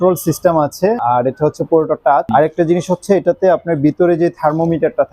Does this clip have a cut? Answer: yes; 2 cuts; at 1.0 s, 2.3 s

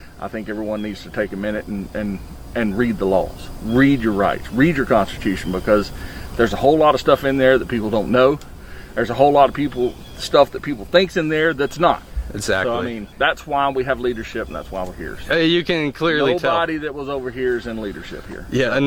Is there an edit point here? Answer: no; 0 cuts

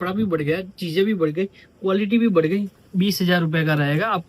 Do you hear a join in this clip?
yes; 1 cut; at 2.8 s

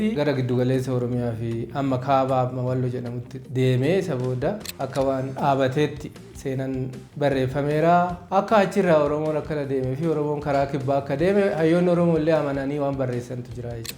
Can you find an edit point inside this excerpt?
yes; 1 cut; at 8.2 s

